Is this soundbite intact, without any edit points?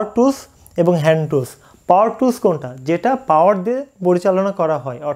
yes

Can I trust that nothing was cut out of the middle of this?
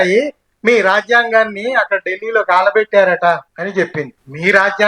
no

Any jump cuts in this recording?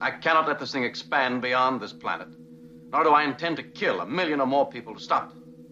no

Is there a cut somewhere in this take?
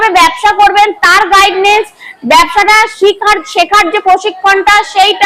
no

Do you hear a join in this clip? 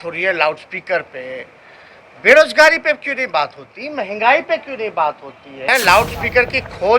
yes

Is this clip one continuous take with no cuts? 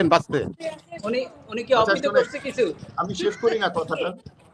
yes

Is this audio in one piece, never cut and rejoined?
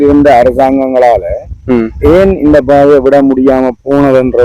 yes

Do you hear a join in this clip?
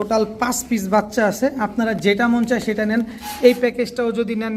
no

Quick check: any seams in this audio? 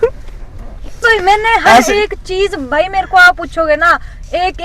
yes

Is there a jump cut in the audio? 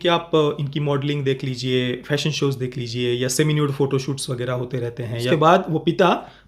yes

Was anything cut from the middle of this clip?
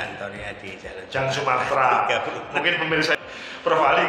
yes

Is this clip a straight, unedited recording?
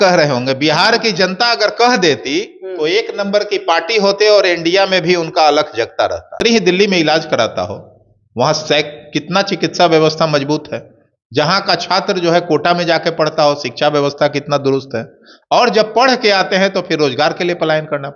no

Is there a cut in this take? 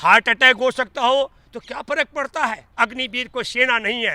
yes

